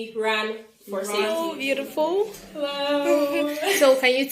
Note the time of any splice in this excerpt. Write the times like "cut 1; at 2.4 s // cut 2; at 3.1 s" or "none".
cut 1; at 1.3 s